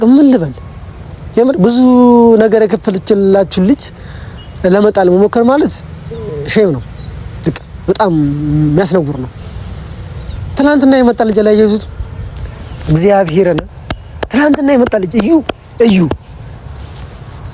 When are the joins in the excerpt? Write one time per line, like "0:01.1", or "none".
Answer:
none